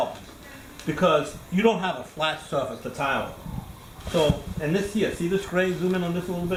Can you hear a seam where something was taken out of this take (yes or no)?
no